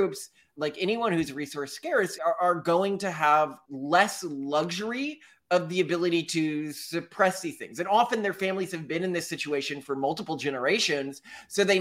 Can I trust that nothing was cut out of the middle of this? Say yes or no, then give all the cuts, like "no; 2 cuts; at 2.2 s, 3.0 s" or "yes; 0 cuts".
no; 2 cuts; at 2.1 s, 3.6 s